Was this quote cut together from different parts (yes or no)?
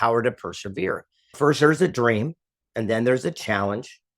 yes